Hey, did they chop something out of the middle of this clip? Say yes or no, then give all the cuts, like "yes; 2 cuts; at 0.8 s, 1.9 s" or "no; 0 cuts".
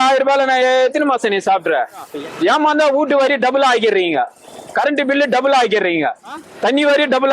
yes; 2 cuts; at 2.1 s, 6.5 s